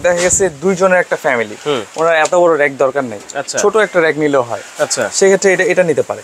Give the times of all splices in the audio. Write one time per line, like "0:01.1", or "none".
none